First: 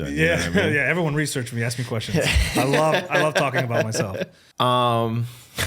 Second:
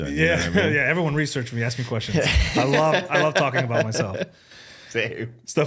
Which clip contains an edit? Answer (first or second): first